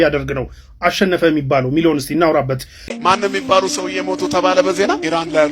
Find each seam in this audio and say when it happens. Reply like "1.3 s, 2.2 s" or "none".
3.0 s

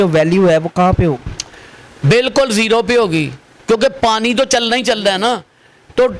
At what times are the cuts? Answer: none

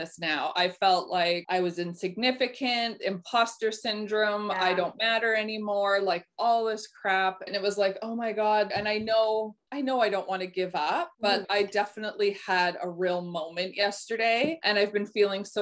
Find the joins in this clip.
1.4 s, 7.5 s, 8.7 s, 9.6 s, 11.5 s, 14.6 s

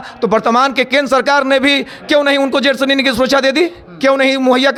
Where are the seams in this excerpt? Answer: none

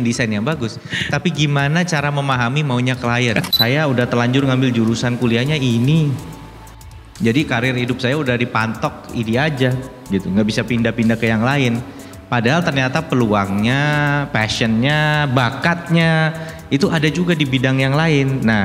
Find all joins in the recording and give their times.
3.5 s

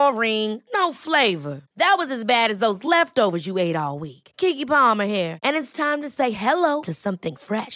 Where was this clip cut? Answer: none

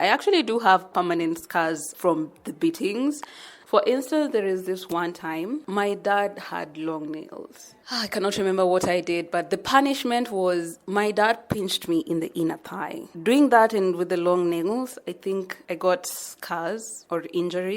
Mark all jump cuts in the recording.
1.9 s, 3.5 s, 5.6 s, 13.1 s

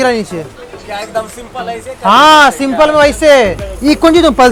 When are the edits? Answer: none

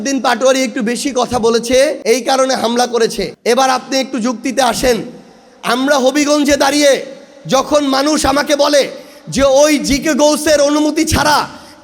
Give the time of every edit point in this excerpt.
2.0 s, 3.3 s

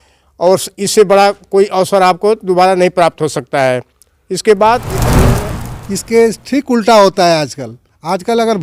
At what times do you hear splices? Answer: 5.3 s

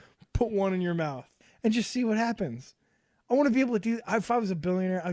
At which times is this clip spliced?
1.4 s

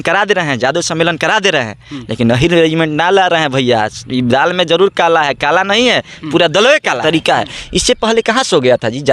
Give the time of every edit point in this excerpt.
7.0 s

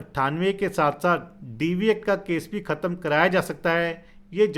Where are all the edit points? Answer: none

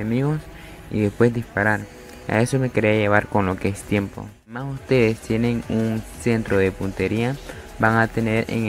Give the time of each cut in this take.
4.7 s

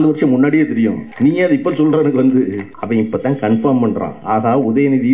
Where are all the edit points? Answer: 1.0 s, 2.7 s, 4.1 s

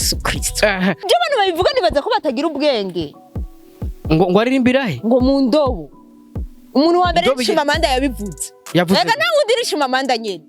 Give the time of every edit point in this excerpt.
1.0 s

